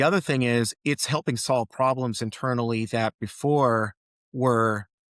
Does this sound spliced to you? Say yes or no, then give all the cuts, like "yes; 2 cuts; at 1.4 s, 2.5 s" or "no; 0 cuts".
no; 0 cuts